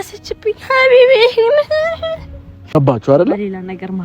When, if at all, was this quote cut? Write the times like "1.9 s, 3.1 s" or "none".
2.7 s